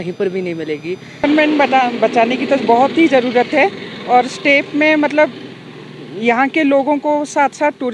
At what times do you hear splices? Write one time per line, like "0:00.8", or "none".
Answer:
0:01.2